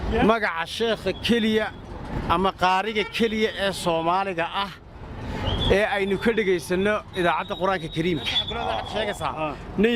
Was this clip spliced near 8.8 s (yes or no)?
yes